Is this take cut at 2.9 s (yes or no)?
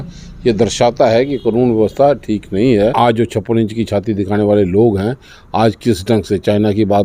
yes